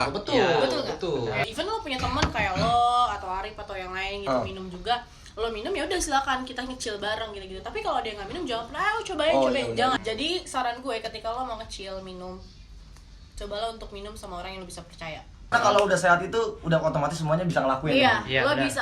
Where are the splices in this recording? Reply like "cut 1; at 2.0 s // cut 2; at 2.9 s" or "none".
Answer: cut 1; at 1.4 s // cut 2; at 10.0 s // cut 3; at 15.5 s